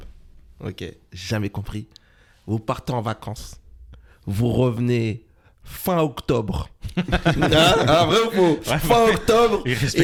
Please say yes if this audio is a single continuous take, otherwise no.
yes